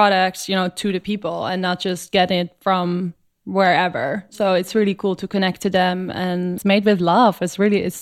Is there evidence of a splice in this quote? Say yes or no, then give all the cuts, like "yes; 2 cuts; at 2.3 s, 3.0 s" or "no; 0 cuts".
yes; 1 cut; at 6.6 s